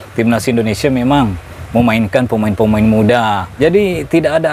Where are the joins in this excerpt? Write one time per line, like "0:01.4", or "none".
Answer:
0:03.6